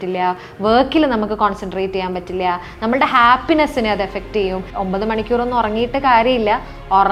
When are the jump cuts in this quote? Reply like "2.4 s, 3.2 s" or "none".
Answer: 4.7 s